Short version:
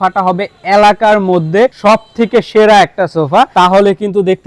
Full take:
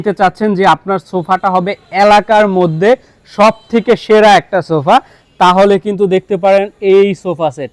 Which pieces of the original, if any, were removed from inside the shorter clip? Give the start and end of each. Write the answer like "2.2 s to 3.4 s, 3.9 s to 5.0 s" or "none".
3.0 s to 3.3 s, 5.0 s to 5.3 s